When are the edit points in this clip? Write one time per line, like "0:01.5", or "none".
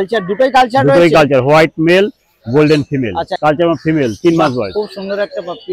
0:03.3